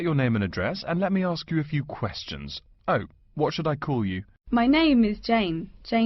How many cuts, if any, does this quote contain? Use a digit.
1